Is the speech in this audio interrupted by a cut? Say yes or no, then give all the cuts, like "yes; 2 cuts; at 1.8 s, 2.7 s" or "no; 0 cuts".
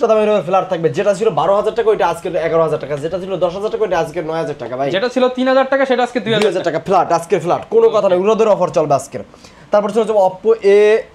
no; 0 cuts